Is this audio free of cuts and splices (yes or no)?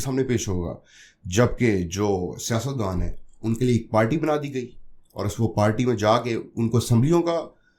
yes